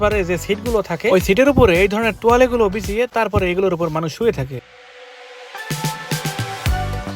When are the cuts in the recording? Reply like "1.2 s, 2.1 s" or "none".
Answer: none